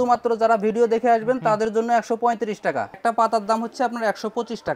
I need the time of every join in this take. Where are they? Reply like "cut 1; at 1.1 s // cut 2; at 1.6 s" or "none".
cut 1; at 3.0 s